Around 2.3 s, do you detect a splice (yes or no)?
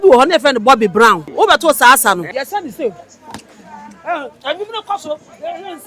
yes